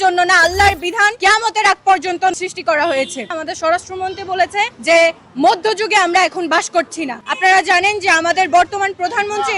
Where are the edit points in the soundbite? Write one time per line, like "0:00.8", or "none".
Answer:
0:01.1
0:02.4
0:03.3
0:04.8
0:07.2

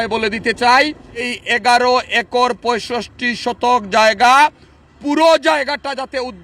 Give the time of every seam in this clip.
0:01.3

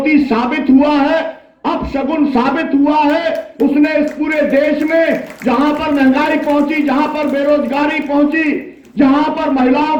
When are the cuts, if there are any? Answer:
none

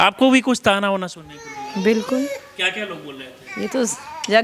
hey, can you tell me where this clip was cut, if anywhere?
none

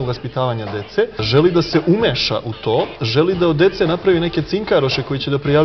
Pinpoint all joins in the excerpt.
0:01.2

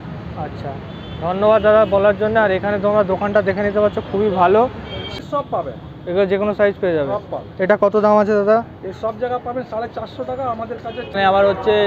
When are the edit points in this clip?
0:05.1
0:11.1

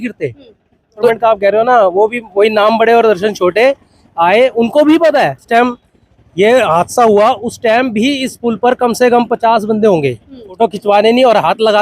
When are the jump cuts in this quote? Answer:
0:01.1
0:05.4
0:10.5

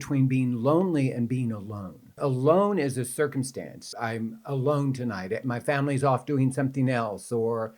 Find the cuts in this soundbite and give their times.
0:02.2
0:03.8

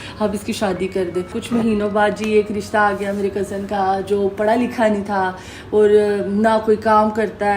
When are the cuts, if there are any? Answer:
0:01.4

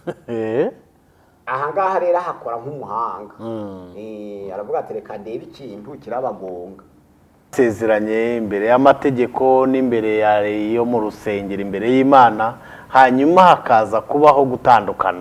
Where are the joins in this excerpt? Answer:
0:07.5

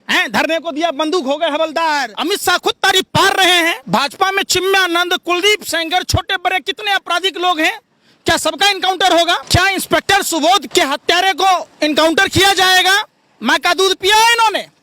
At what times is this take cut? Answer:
0:02.1
0:03.8
0:09.4
0:10.7

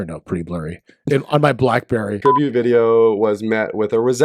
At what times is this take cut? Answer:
0:02.2

